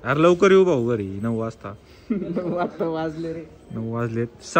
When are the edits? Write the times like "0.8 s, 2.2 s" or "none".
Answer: none